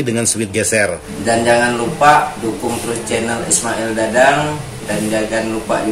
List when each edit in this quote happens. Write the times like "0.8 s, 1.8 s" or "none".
1.1 s